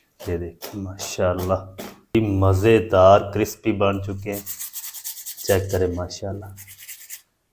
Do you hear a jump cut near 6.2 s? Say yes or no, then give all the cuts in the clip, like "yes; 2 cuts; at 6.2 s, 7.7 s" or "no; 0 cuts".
no; 1 cut; at 2.1 s